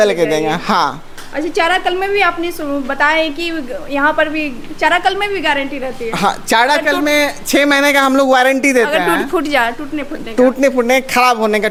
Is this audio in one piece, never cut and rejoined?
yes; 0 cuts

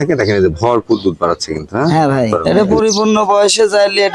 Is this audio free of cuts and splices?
no; 1 cut; at 2.4 s

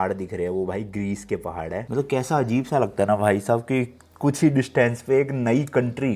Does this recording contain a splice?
no; 0 cuts

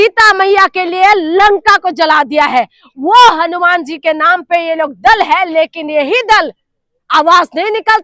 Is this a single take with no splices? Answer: yes; 0 cuts

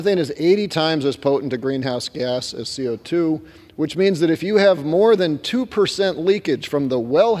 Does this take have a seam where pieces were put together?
no; 0 cuts

